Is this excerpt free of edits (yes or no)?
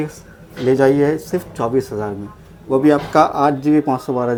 yes